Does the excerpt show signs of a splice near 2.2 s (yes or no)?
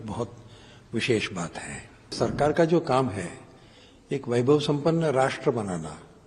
yes